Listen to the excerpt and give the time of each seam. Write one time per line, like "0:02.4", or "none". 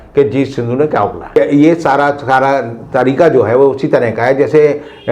0:01.2